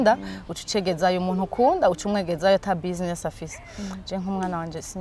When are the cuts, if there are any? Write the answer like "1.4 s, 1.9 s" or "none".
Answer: none